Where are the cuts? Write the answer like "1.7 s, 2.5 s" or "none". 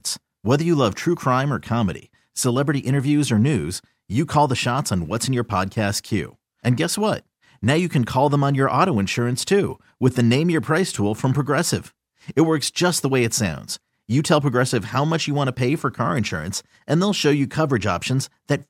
none